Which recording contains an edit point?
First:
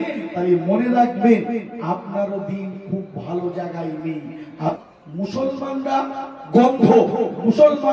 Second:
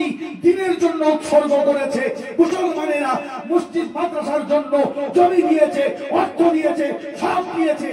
first; 1 cut; at 4.8 s

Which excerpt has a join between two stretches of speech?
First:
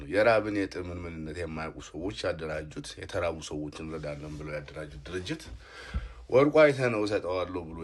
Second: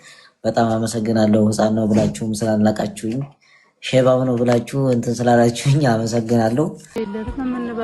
second; 1 cut; at 6.8 s

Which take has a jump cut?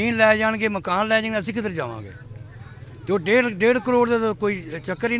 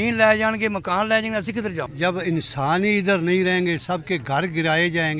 second; 1 cut; at 1.9 s

